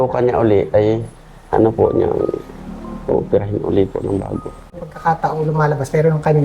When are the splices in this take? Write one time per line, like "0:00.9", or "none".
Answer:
0:04.7